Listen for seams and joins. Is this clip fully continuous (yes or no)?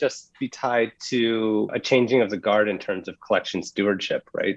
no